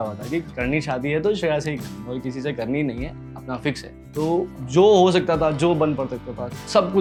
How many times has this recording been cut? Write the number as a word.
zero